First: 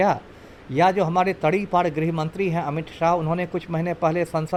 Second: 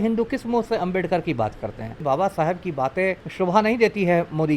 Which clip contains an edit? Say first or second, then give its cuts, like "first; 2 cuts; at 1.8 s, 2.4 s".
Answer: second; 2 cuts; at 2.0 s, 3.2 s